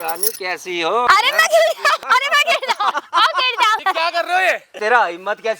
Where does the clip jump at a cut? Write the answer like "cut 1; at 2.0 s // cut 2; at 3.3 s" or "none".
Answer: cut 1; at 1.1 s // cut 2; at 2.0 s // cut 3; at 3.0 s // cut 4; at 3.8 s // cut 5; at 4.8 s